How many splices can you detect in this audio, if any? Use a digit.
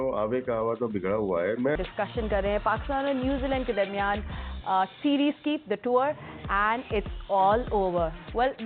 1